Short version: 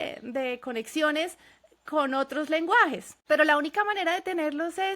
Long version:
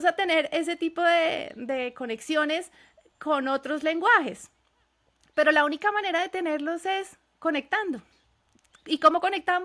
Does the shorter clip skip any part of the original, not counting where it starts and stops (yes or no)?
yes